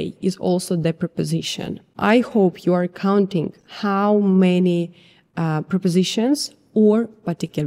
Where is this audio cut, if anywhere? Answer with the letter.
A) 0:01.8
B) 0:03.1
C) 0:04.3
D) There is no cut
A